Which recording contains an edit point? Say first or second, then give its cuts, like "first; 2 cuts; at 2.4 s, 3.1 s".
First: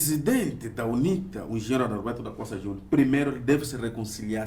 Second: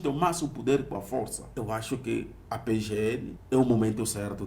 second; 2 cuts; at 1.4 s, 3.3 s